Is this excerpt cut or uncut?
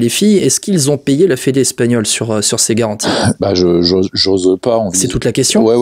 uncut